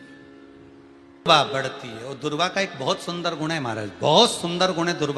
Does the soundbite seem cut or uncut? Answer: cut